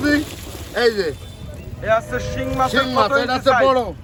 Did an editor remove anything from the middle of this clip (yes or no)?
no